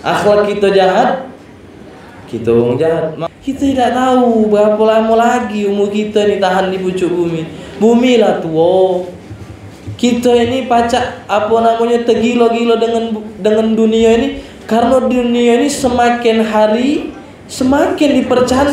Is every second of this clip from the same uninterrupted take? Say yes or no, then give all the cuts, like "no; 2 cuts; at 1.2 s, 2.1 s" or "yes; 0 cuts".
no; 1 cut; at 3.2 s